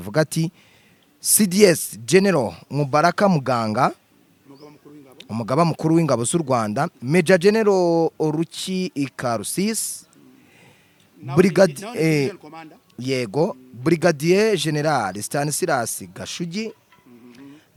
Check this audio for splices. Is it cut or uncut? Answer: uncut